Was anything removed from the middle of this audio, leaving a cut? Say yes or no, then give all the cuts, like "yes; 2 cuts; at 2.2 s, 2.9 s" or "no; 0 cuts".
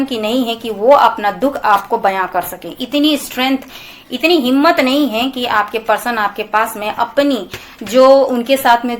no; 0 cuts